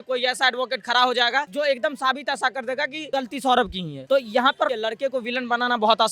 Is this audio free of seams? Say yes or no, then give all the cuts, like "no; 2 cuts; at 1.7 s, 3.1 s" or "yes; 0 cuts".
no; 4 cuts; at 1.5 s, 3.1 s, 3.9 s, 4.7 s